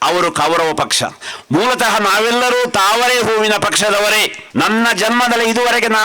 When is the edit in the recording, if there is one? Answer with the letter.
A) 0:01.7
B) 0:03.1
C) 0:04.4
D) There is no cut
C